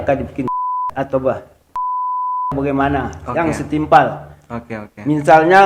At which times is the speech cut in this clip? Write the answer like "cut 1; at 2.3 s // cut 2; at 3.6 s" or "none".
none